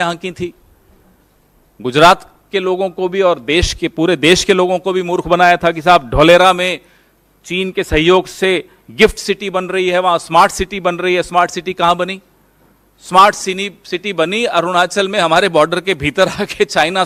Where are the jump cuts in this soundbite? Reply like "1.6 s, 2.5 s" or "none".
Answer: none